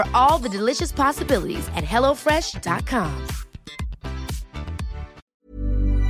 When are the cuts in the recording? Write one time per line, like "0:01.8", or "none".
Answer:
0:05.2